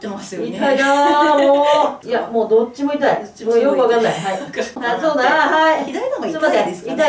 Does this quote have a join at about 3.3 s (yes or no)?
no